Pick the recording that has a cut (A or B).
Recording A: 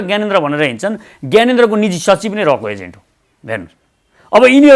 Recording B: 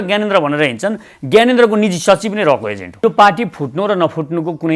B